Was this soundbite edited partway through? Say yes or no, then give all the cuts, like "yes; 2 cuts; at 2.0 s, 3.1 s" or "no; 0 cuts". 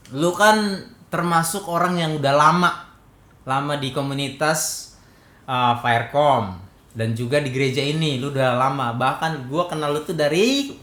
no; 0 cuts